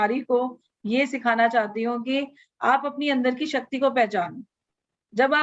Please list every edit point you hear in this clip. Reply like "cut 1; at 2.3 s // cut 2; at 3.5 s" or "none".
none